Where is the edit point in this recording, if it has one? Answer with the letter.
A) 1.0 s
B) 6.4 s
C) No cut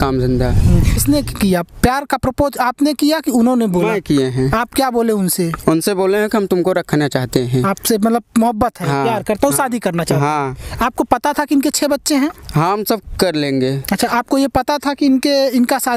A